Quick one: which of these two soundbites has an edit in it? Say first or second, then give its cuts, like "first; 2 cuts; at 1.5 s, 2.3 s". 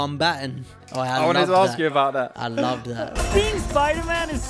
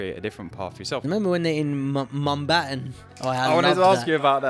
second; 1 cut; at 1.0 s